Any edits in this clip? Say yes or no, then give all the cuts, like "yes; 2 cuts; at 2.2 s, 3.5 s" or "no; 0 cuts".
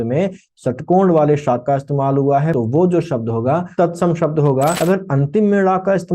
yes; 3 cuts; at 2.5 s, 3.7 s, 4.8 s